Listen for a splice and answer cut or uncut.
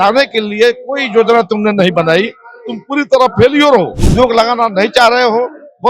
cut